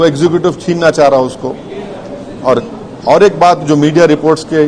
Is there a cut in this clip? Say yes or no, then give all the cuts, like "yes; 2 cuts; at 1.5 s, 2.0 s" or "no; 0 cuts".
no; 0 cuts